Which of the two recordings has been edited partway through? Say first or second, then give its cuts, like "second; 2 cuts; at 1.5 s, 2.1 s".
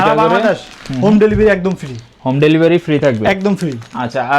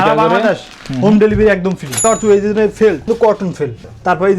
second; 2 cuts; at 2.0 s, 3.1 s